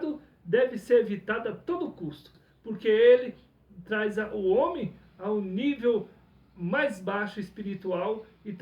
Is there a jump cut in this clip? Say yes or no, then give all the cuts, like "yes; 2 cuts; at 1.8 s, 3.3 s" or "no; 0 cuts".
yes; 1 cut; at 2.4 s